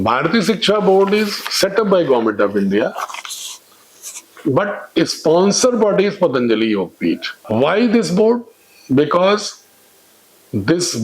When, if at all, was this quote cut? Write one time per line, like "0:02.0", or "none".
0:07.3